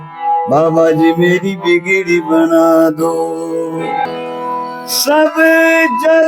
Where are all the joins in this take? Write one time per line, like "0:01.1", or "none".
0:04.0